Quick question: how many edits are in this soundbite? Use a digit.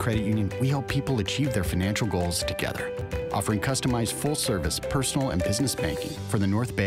0